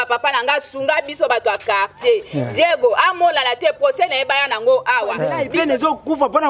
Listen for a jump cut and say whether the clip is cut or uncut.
cut